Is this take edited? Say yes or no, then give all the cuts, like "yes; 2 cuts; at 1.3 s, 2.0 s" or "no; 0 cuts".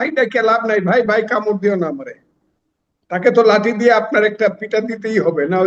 no; 0 cuts